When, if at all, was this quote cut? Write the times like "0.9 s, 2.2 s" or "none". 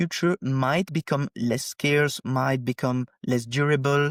none